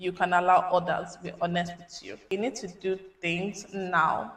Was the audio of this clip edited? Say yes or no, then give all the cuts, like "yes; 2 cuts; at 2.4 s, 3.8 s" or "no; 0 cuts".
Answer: yes; 1 cut; at 2.3 s